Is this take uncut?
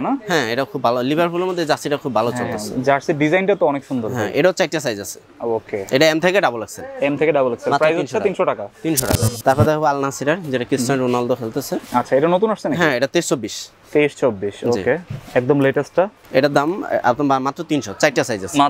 no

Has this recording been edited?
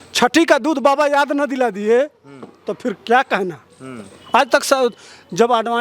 no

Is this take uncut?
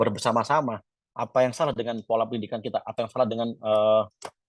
yes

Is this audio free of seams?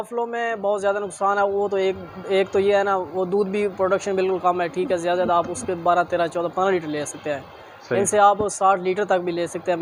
yes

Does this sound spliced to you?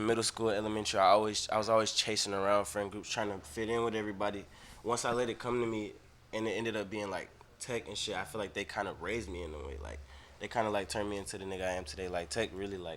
no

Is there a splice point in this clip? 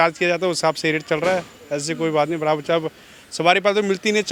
no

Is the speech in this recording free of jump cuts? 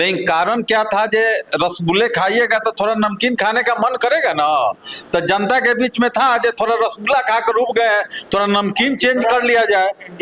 yes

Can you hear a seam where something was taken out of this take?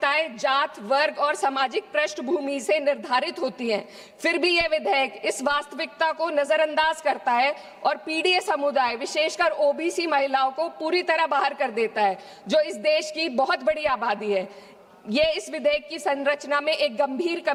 no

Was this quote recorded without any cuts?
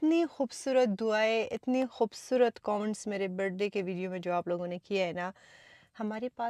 yes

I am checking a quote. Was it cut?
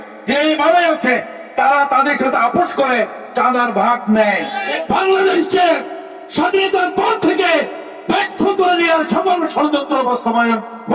yes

